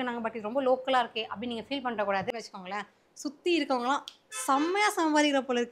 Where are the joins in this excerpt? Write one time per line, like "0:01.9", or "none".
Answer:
0:02.3